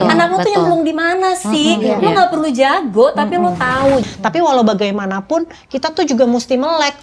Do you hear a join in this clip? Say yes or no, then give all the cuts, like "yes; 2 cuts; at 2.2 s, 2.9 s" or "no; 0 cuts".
yes; 1 cut; at 4.0 s